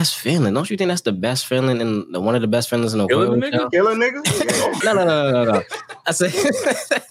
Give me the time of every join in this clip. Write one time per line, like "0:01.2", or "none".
0:04.8